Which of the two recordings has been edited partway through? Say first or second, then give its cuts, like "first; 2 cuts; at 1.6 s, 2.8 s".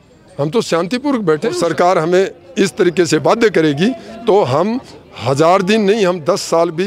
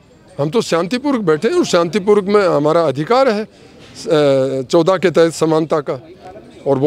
first; 1 cut; at 1.6 s